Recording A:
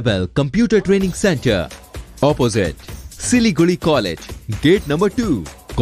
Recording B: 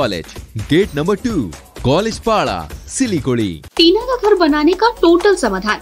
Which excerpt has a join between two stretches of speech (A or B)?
B